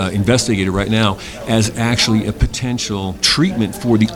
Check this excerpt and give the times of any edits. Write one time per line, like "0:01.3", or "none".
0:03.2